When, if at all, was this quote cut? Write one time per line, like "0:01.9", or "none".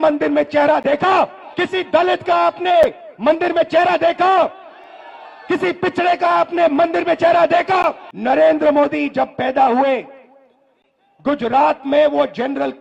0:01.4
0:08.1